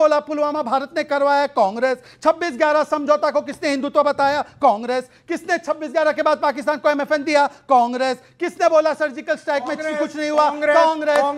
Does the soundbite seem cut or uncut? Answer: uncut